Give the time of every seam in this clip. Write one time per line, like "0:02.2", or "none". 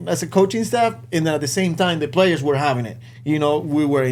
none